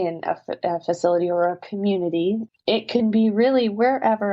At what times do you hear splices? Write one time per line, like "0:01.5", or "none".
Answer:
0:02.5